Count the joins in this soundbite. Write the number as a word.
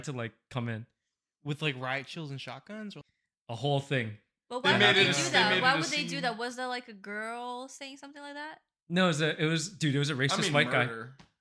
one